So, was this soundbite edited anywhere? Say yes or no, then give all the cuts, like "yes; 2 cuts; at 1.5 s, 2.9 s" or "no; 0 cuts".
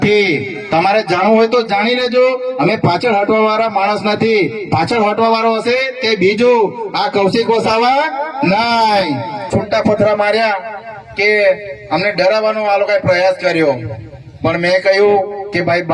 yes; 1 cut; at 9.5 s